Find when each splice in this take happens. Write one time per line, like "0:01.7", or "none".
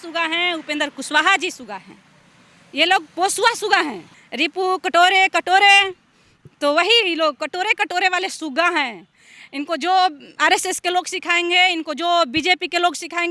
0:04.2